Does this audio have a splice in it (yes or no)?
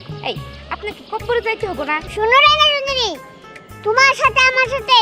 yes